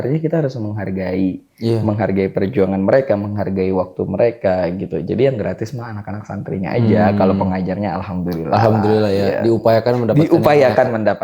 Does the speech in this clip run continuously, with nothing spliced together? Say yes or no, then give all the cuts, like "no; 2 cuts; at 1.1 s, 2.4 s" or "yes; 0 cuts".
yes; 0 cuts